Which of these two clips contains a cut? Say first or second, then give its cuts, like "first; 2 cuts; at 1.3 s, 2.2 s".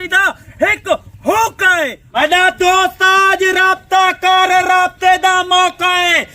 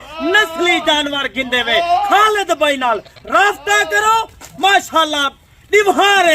first; 1 cut; at 2.0 s